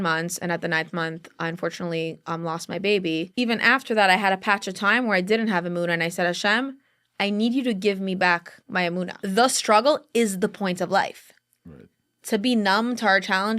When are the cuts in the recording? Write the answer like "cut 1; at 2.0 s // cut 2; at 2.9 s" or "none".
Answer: cut 1; at 3.3 s // cut 2; at 9.2 s